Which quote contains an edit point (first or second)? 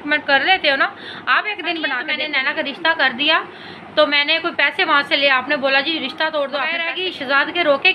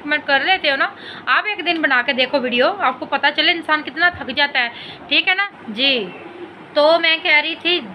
first